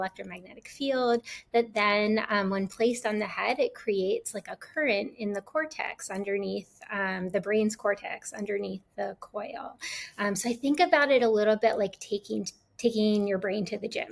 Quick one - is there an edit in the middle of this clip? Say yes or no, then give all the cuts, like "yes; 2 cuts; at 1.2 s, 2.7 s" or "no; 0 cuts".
no; 0 cuts